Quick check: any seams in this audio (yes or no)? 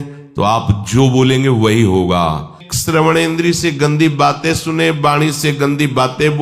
yes